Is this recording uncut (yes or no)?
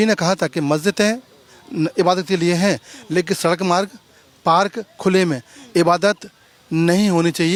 yes